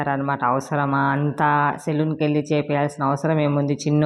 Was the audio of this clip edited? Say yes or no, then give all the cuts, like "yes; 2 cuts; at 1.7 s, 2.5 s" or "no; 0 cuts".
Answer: no; 0 cuts